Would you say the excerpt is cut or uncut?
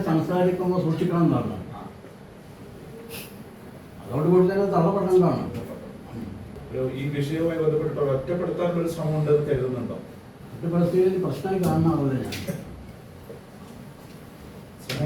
cut